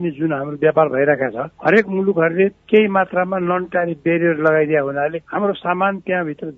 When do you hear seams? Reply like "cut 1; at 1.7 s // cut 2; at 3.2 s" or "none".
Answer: none